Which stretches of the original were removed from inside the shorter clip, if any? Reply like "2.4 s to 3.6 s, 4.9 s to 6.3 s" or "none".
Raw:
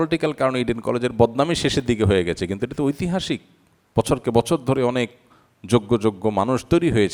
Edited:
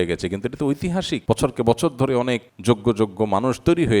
3.4 s to 3.9 s, 5.2 s to 5.5 s